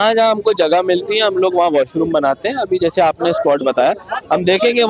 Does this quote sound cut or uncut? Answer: uncut